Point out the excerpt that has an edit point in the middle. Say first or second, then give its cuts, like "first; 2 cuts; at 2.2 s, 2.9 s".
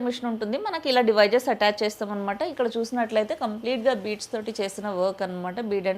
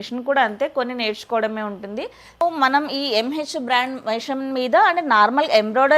second; 1 cut; at 2.4 s